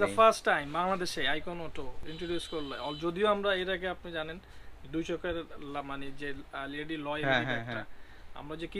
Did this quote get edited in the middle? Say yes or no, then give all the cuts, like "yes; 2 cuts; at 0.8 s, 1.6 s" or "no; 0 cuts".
no; 0 cuts